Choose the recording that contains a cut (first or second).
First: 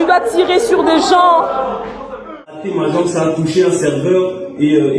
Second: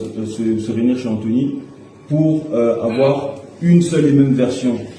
first